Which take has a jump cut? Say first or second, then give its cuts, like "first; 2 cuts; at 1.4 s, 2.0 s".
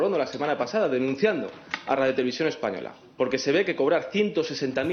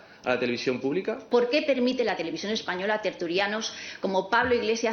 second; 1 cut; at 1.2 s